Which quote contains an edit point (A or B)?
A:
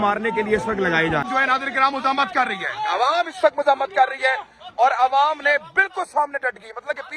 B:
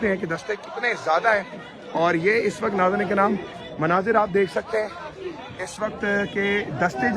A